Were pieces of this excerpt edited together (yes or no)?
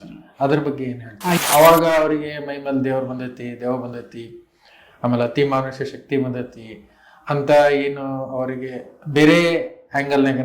yes